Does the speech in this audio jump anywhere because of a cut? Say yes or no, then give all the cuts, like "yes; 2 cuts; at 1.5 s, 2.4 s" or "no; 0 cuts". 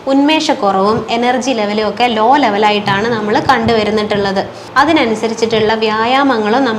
yes; 1 cut; at 4.6 s